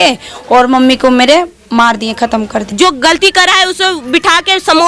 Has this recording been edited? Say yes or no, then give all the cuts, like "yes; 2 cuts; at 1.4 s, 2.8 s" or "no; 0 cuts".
yes; 1 cut; at 2.7 s